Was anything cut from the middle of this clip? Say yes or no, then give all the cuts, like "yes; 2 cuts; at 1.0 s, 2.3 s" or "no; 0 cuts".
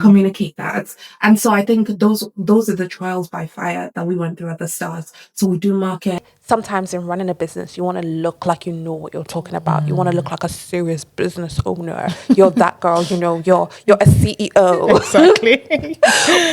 yes; 1 cut; at 6.2 s